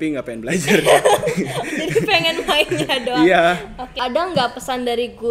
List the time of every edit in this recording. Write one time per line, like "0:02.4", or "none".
0:03.9